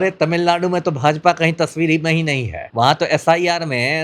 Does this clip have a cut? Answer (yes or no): yes